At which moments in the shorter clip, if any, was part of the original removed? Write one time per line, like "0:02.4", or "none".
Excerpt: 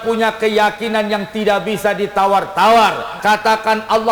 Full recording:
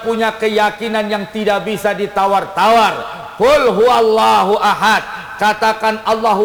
0:03.1